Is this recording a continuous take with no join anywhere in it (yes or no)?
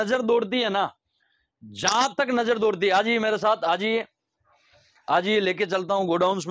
yes